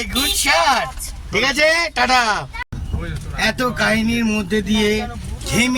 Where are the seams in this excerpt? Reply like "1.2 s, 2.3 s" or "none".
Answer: none

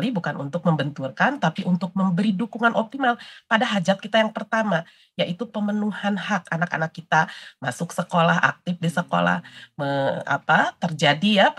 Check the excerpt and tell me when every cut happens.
none

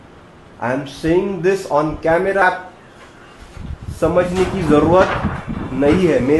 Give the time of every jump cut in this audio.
2.4 s

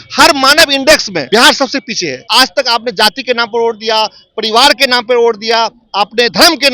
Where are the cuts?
1.2 s, 2.2 s

